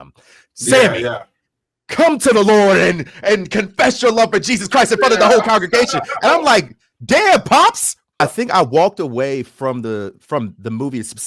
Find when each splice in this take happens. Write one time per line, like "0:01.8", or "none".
0:08.2